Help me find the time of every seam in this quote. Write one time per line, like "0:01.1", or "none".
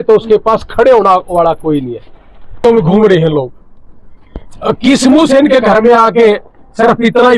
0:02.6